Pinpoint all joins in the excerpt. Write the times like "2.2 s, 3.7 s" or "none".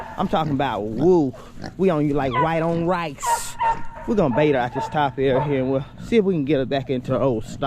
4.0 s

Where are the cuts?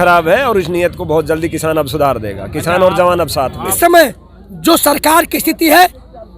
3.8 s

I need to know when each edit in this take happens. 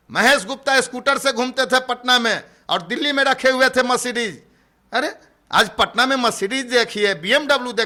none

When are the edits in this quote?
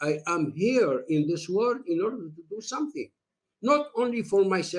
none

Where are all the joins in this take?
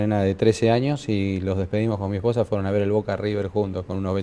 none

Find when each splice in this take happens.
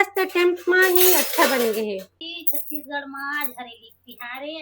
2.1 s

